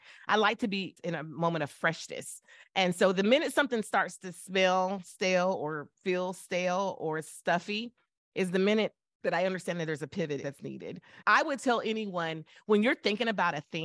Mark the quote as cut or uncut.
cut